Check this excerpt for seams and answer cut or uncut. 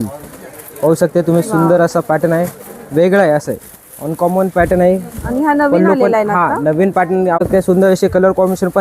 cut